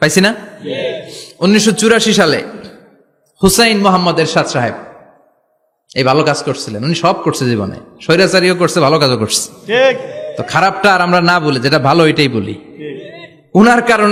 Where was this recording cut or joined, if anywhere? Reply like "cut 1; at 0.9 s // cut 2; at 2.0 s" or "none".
none